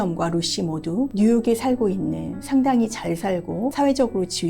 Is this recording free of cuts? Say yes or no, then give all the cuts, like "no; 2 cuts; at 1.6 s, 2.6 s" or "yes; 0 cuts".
no; 2 cuts; at 1.1 s, 3.7 s